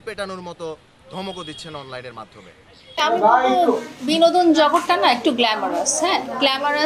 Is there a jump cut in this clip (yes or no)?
yes